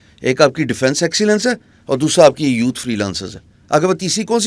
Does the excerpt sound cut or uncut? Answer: uncut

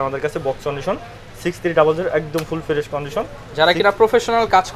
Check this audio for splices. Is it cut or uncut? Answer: uncut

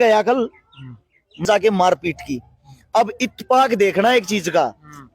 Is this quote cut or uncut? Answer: cut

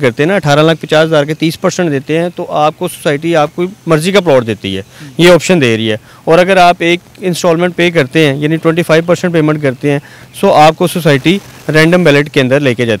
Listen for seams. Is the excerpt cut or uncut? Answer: uncut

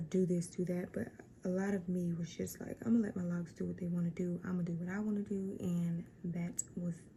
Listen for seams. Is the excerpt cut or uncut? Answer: uncut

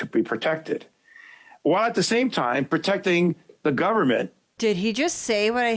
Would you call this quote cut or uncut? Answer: cut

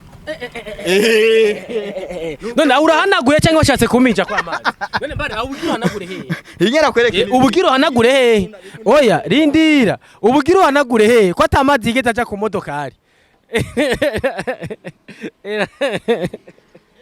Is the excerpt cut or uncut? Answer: uncut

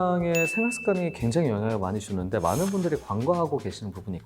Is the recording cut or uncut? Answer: uncut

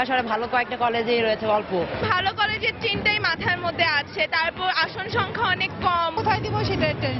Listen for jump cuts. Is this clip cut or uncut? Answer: cut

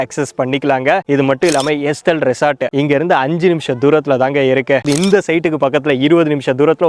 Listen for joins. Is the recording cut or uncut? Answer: cut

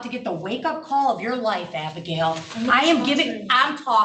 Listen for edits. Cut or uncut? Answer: uncut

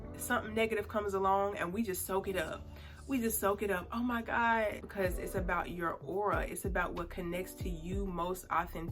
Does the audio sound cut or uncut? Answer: cut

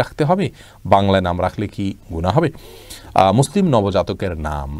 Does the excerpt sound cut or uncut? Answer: uncut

